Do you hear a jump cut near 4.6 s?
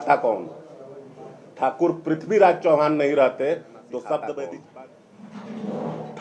yes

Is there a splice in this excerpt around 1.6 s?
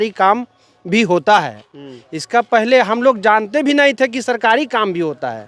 no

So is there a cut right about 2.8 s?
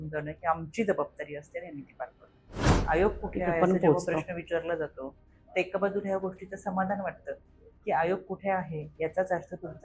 yes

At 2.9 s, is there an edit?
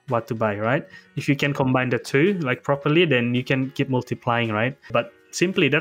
no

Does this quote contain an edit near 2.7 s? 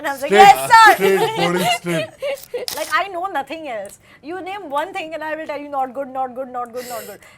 yes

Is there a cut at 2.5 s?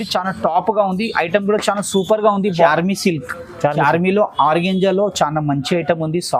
yes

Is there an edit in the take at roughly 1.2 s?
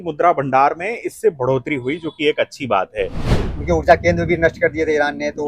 no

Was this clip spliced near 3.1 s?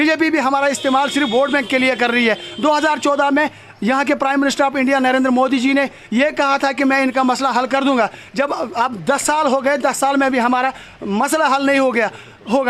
no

